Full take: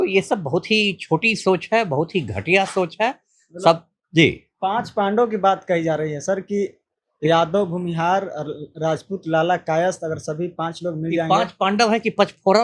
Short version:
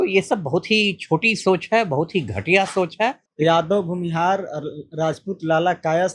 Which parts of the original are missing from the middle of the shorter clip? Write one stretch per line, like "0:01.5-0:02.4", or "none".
0:03.2-0:07.1